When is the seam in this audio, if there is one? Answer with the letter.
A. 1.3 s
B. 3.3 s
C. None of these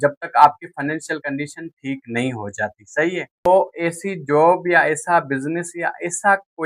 B